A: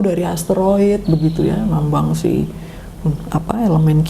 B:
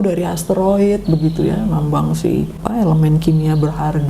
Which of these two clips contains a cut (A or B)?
B